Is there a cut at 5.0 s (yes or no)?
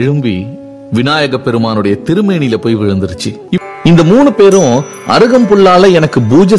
no